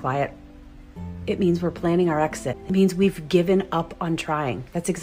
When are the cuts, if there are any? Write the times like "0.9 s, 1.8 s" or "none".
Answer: 2.5 s